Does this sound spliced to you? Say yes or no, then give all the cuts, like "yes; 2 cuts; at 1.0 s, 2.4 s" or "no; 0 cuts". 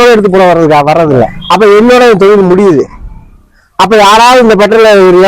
yes; 1 cut; at 1.4 s